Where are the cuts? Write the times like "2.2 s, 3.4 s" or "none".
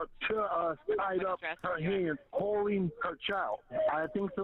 0.8 s, 2.2 s, 3.7 s